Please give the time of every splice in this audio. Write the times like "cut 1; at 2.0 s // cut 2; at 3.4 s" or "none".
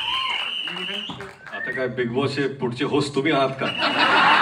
none